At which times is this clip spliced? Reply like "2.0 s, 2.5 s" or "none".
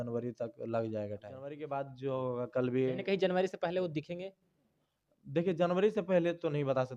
1.6 s

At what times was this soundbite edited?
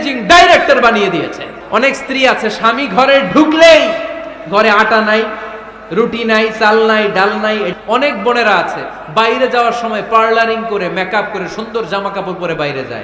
1.5 s, 7.7 s

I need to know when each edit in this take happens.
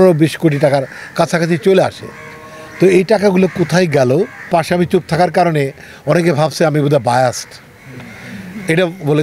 4.5 s

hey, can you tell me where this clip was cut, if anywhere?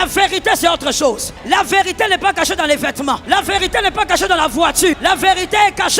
1.3 s, 3.2 s, 5.0 s

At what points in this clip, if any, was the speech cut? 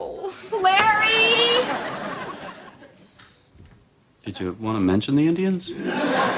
none

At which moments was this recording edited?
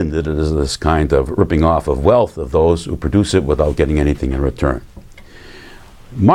none

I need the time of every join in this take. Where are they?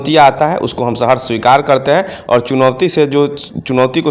none

